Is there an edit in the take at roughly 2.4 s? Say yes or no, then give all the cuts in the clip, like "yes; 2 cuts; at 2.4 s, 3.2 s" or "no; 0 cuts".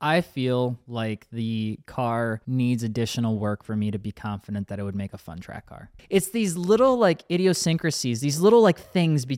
yes; 3 cuts; at 0.8 s, 2.4 s, 5.9 s